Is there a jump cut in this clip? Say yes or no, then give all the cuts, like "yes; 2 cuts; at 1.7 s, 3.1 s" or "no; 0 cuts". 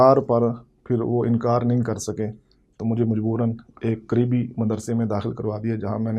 no; 0 cuts